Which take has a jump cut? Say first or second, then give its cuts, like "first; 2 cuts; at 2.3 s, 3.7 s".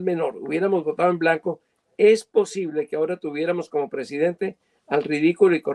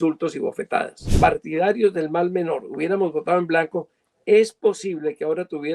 second; 1 cut; at 1.0 s